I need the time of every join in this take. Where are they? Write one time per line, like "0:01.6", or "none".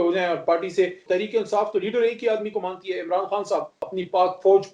0:01.0
0:03.8